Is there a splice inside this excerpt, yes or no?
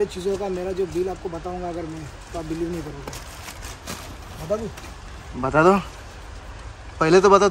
no